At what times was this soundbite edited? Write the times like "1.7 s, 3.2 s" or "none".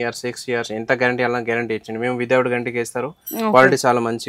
none